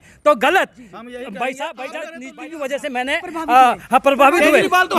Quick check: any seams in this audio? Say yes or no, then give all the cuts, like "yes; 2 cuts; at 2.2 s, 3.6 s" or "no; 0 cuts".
yes; 1 cut; at 2.4 s